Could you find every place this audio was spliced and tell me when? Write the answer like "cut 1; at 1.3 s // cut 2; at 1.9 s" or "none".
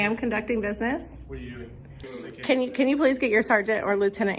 cut 1; at 2.0 s